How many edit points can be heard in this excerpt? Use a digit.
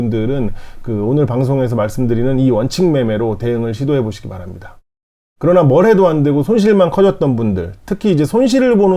1